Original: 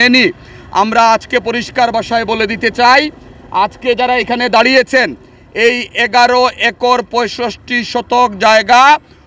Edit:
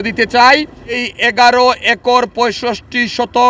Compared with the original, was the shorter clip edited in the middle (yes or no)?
yes